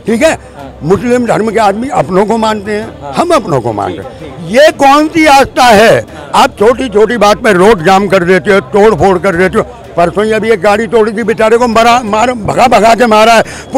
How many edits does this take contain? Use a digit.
0